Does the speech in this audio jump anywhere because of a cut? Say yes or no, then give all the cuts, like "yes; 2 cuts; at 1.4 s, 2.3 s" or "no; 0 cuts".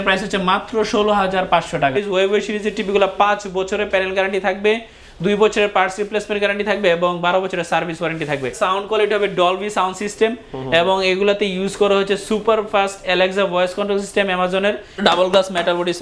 yes; 3 cuts; at 1.9 s, 8.6 s, 15.0 s